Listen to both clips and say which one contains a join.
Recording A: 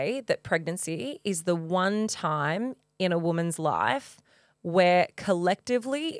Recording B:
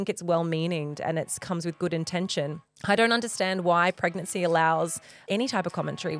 B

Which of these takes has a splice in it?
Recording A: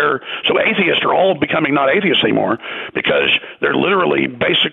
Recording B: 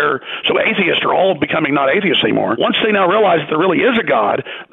B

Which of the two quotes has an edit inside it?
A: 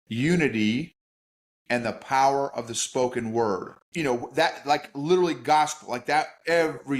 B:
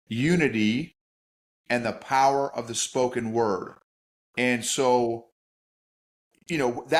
A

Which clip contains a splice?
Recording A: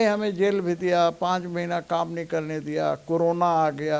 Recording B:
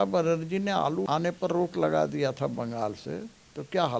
B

